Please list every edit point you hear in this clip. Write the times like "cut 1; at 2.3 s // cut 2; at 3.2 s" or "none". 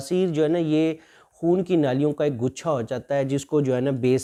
none